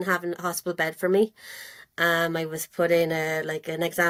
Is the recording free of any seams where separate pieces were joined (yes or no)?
yes